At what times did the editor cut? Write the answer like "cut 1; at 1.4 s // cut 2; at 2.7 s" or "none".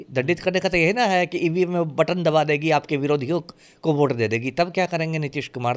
none

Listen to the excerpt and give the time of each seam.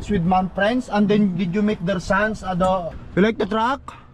cut 1; at 2.9 s

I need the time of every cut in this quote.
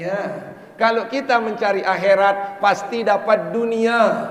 none

